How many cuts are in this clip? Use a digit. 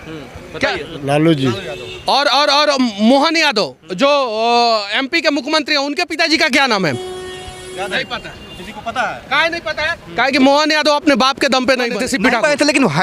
1